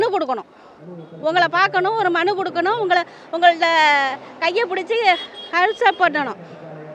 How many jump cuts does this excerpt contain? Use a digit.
0